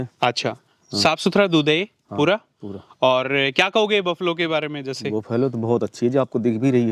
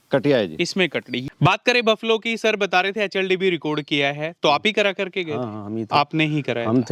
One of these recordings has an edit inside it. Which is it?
second; 1 cut; at 1.1 s

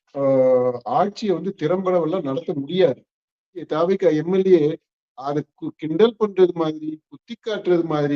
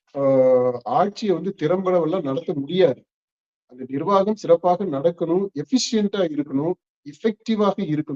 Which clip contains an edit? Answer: first; 1 cut; at 3.7 s

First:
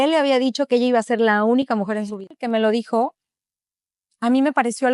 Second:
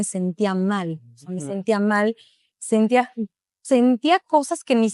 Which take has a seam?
first; 1 cut; at 2.4 s

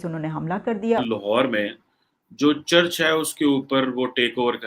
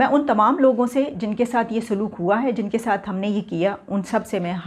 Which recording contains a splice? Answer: first; 1 cut; at 1.0 s

